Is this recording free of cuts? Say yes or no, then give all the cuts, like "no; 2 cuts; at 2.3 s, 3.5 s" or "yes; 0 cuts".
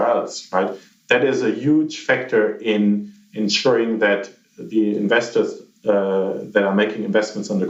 yes; 0 cuts